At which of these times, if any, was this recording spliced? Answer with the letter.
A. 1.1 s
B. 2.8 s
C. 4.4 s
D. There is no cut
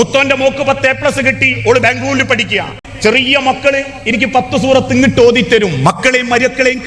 B